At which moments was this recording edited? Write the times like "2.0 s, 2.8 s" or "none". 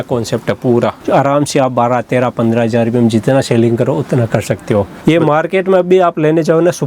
1.0 s, 4.9 s